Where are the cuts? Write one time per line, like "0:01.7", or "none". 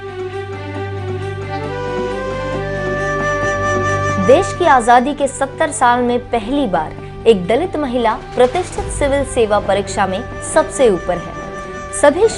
0:04.2

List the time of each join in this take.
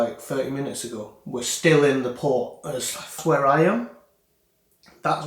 0:03.2

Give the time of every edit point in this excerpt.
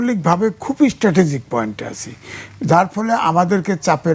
none

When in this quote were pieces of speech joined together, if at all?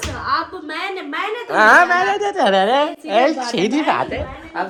none

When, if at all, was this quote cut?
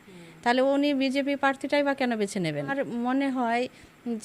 0:02.7

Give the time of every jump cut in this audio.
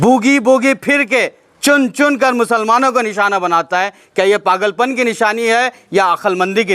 none

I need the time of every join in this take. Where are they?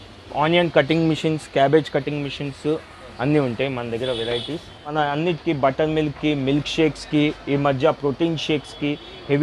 0:04.9

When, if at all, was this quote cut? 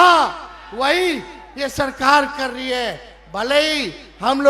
none

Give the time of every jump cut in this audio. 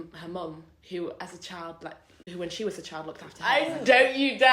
0:02.1
0:03.3

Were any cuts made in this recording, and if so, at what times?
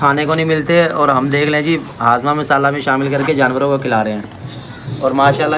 none

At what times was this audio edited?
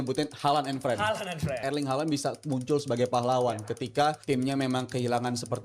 0:01.6
0:04.2

